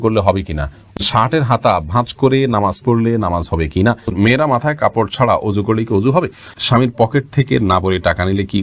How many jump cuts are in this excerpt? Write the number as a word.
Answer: three